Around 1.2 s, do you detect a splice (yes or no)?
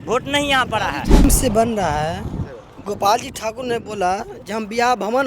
yes